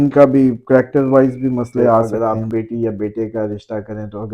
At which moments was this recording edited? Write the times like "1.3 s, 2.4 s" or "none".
2.1 s

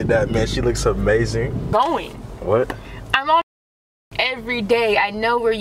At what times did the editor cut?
1.7 s

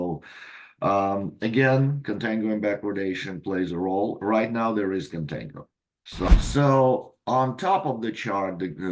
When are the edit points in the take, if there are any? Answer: 6.3 s

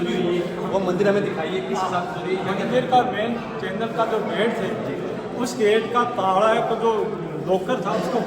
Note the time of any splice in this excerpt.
none

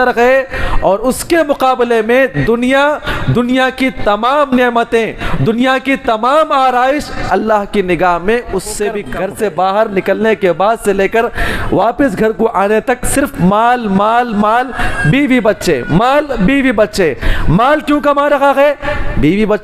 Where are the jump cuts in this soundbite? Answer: 9.0 s

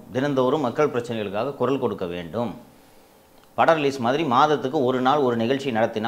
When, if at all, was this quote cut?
none

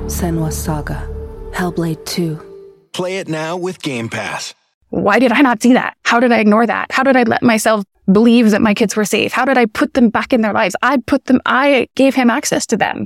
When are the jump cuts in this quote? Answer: 4.8 s, 6.0 s, 7.9 s, 11.9 s

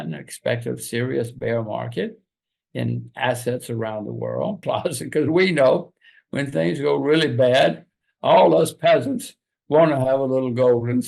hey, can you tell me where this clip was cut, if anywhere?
4.6 s

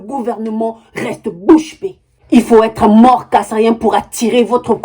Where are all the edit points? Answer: 2.1 s

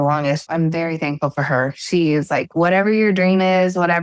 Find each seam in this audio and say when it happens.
none

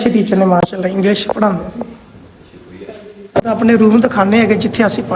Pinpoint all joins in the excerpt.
3.5 s

